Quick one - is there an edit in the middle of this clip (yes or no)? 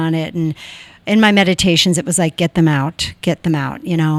no